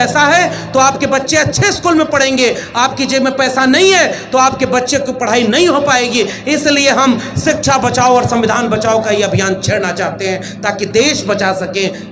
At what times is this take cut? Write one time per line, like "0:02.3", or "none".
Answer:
none